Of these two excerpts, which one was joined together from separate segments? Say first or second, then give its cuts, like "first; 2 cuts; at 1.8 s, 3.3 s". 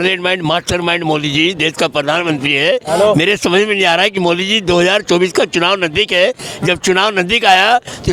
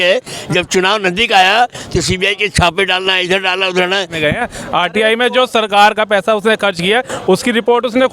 second; 1 cut; at 4.1 s